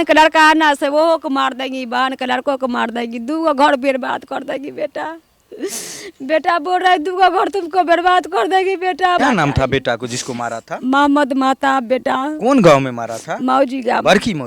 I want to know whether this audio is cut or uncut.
cut